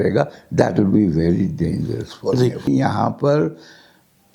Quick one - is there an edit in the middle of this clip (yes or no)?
yes